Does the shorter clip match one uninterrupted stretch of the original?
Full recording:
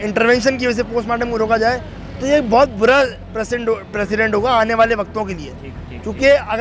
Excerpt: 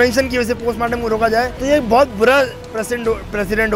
no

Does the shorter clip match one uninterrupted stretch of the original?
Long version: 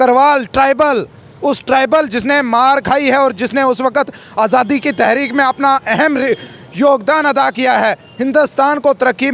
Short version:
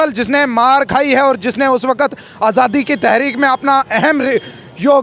yes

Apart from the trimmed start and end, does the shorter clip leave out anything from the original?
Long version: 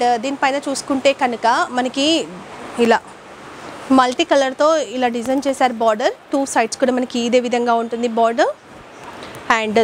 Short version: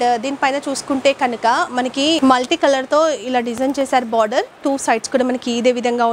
yes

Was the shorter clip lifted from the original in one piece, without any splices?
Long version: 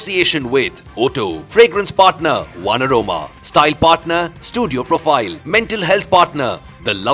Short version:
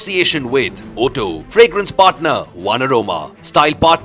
yes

